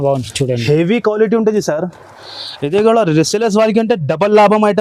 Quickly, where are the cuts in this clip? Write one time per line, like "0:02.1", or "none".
none